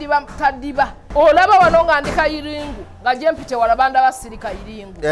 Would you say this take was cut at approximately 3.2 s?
no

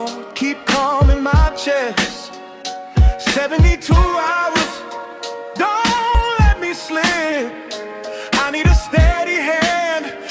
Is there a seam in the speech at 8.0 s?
no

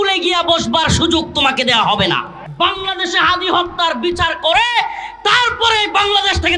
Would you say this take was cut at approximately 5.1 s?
no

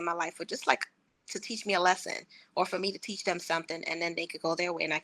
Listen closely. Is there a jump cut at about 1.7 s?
no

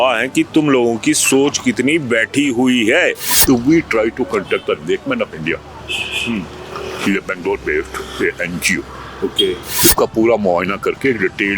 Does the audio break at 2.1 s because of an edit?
no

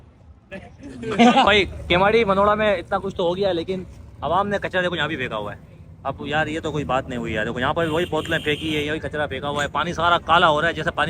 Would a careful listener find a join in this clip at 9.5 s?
no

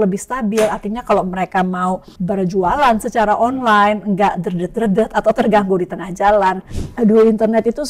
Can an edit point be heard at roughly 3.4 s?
no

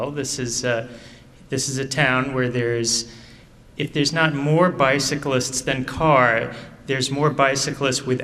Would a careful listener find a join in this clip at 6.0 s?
no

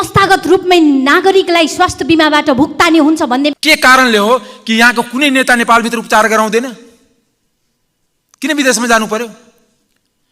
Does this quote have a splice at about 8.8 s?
no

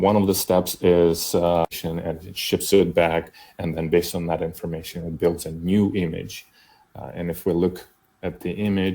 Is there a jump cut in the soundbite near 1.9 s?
yes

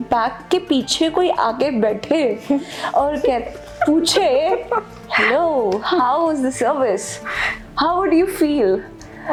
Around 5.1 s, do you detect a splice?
no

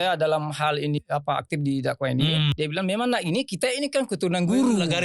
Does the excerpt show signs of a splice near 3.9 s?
no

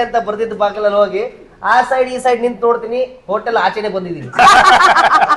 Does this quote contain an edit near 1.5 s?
no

